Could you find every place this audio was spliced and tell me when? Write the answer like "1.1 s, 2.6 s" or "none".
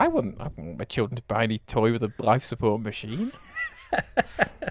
none